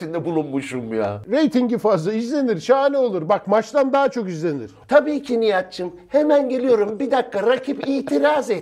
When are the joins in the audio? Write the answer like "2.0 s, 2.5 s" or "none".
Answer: 1.2 s, 4.7 s